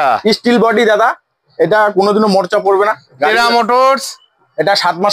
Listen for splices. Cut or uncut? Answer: uncut